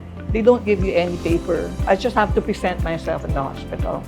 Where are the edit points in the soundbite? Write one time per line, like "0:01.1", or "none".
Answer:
0:01.8